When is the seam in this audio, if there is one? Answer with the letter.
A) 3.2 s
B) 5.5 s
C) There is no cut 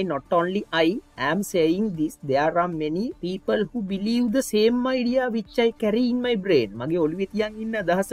A